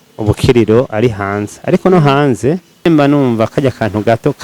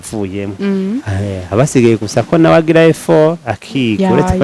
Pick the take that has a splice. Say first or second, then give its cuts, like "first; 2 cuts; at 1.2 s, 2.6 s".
first; 1 cut; at 2.9 s